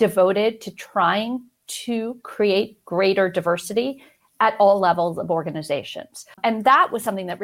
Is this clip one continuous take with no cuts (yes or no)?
no